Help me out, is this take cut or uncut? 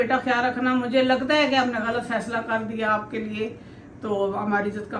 uncut